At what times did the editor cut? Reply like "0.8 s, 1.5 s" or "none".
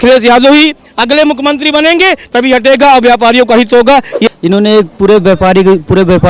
4.3 s